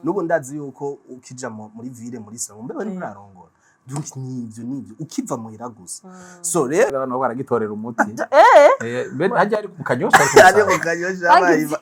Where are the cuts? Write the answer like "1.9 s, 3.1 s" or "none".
6.9 s